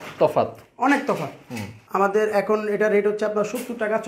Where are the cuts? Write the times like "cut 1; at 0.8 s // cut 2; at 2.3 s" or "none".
cut 1; at 1.8 s